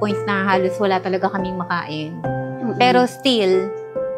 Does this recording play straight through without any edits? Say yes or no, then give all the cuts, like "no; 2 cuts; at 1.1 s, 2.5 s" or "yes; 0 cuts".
yes; 0 cuts